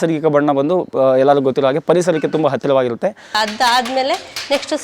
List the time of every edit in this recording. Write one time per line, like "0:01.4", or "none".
0:03.4

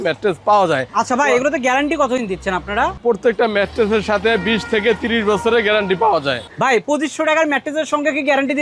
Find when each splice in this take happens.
none

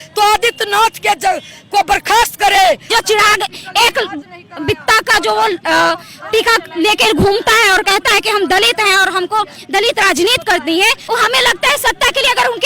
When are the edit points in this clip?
0:02.9
0:11.0

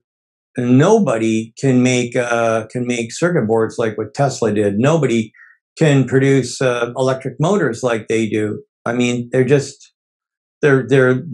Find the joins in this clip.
none

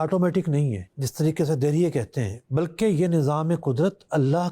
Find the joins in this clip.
0:00.9

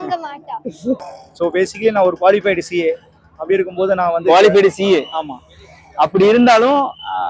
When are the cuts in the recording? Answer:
0:01.0

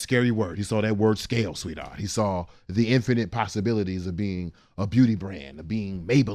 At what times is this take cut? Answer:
none

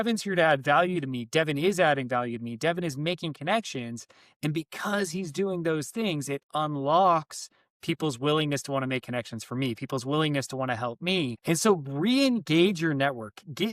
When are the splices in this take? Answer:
0:11.4

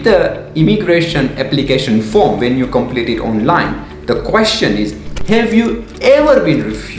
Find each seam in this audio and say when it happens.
none

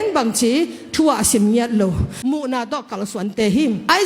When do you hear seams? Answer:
0:02.2

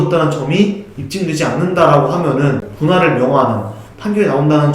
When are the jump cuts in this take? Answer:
0:02.7

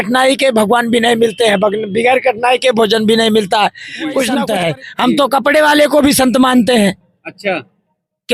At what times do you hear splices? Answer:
0:04.4

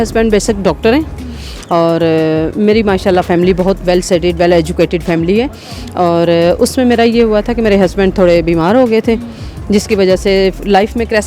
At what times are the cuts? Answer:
none

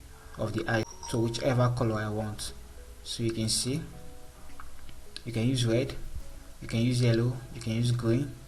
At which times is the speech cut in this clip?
0:00.9

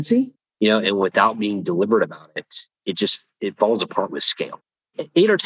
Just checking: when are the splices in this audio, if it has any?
none

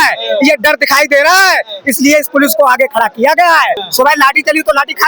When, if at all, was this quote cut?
0:03.8

